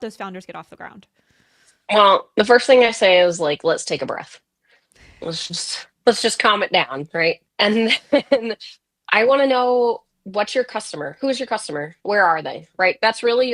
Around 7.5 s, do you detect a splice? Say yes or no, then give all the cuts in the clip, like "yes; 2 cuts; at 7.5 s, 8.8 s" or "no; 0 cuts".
yes; 1 cut; at 7.5 s